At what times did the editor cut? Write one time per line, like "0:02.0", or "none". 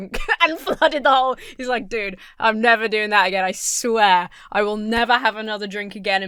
none